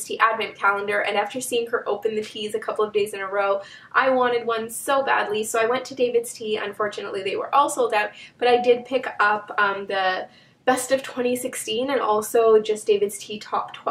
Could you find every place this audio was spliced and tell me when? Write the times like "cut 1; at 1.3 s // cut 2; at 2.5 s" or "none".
cut 1; at 9.3 s